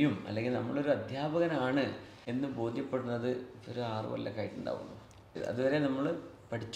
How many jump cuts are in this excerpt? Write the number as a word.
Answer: two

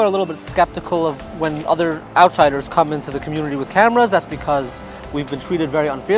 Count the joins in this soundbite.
one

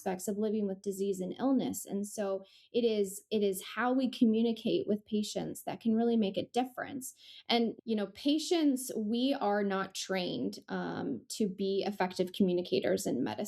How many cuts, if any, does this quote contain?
one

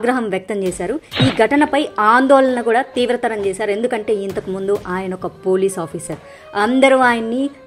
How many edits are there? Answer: zero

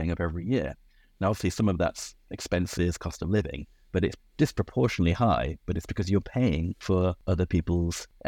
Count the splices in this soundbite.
one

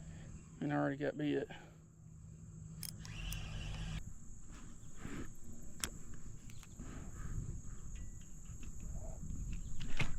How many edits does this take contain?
one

